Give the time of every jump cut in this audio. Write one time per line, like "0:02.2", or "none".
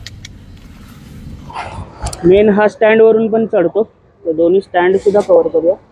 0:01.5